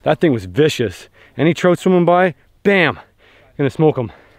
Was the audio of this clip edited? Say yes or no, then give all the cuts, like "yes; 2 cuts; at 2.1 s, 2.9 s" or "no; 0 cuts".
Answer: no; 0 cuts